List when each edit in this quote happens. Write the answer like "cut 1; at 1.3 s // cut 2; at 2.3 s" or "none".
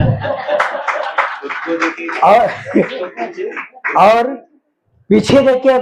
none